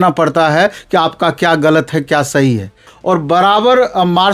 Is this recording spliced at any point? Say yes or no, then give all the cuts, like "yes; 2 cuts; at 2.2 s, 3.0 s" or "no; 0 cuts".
yes; 1 cut; at 2.9 s